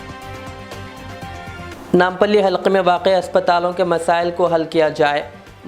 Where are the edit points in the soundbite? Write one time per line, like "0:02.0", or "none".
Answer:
0:01.7